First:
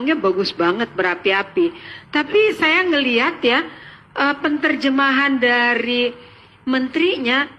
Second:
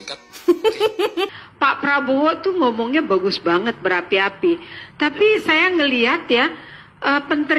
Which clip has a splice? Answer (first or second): second